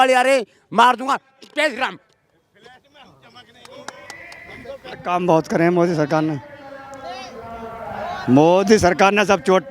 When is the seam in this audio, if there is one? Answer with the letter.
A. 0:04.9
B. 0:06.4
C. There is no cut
A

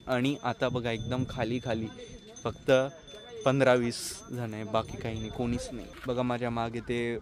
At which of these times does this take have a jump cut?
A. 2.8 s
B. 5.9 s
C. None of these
B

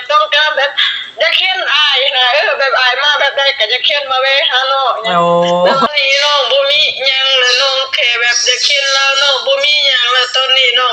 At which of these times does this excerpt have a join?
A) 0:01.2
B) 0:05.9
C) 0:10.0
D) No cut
B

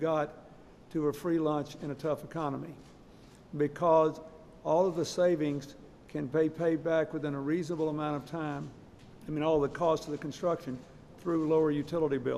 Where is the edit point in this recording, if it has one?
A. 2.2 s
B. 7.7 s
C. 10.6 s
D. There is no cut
A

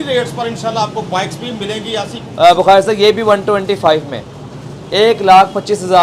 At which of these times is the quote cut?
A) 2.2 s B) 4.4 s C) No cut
A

